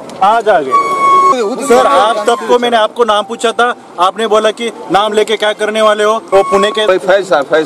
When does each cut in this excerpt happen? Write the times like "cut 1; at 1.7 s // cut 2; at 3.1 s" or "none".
cut 1; at 1.3 s // cut 2; at 6.2 s